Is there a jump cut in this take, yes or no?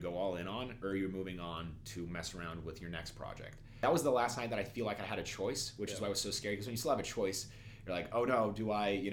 yes